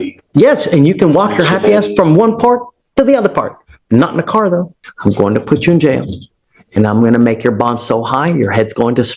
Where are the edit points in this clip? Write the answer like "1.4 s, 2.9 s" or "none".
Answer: 4.8 s